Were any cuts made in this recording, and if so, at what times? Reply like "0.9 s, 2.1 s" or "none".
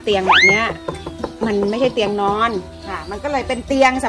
3.0 s